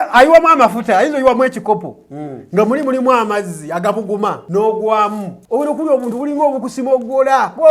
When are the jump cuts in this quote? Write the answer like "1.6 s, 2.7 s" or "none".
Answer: 4.4 s, 5.3 s